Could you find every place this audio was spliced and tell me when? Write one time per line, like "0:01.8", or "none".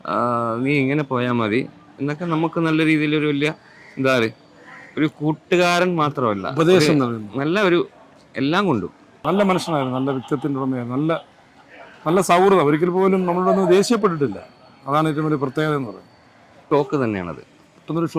0:09.2
0:16.5

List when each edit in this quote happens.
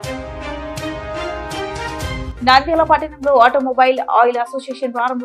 0:02.3

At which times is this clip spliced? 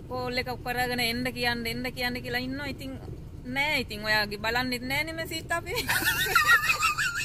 none

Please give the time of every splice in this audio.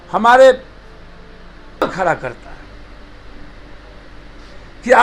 0:01.8

